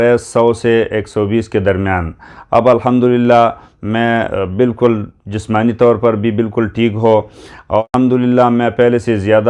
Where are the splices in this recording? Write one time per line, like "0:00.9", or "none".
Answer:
0:07.8

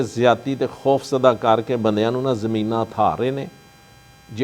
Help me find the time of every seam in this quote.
none

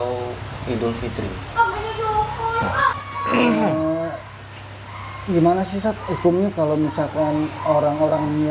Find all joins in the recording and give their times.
0:03.0

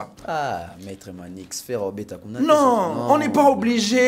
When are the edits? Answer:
none

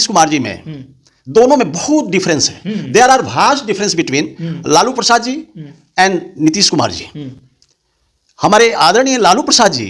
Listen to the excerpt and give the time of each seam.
none

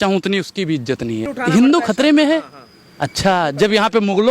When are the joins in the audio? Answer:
0:01.3

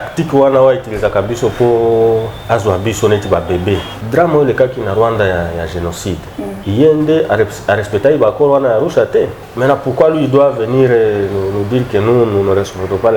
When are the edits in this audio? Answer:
0:03.9
0:06.6
0:09.4

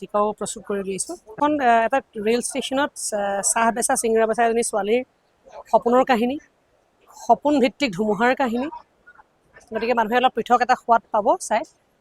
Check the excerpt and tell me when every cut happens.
0:01.3

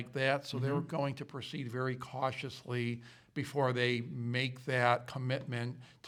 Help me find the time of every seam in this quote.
none

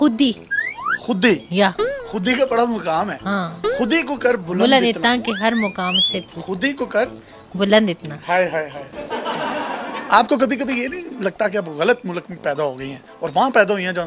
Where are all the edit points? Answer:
0:08.8
0:10.0

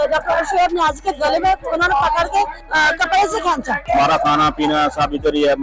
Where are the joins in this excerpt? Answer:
0:02.6
0:03.9

